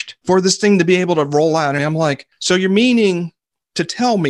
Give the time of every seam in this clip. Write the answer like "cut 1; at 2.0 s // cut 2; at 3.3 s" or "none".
cut 1; at 1.8 s